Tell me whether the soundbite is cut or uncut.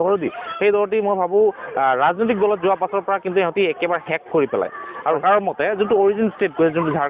cut